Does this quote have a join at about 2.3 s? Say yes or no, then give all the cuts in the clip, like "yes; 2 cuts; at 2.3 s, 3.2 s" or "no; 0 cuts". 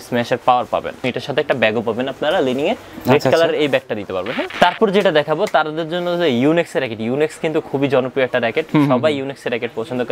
no; 2 cuts; at 1.1 s, 4.4 s